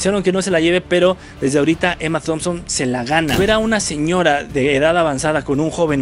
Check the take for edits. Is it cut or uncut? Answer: cut